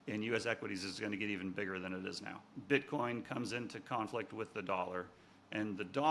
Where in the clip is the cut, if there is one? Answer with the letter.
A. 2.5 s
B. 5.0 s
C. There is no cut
A